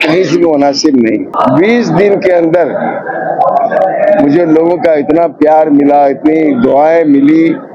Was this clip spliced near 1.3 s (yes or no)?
yes